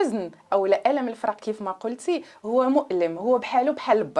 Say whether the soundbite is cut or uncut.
uncut